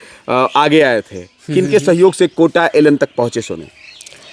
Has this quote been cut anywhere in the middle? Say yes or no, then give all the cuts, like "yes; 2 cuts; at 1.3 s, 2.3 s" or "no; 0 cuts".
no; 0 cuts